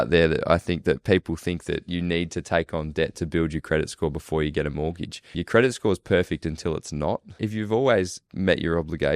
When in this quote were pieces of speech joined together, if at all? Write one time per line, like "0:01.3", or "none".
0:05.3
0:07.3
0:08.2